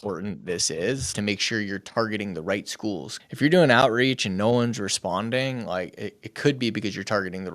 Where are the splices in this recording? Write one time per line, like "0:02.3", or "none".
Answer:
0:01.1
0:03.1